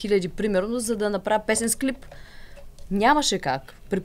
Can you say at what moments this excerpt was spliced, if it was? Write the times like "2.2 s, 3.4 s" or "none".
none